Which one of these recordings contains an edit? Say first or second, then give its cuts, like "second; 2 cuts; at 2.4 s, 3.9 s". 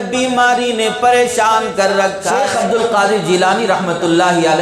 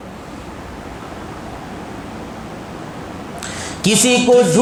first; 1 cut; at 2.5 s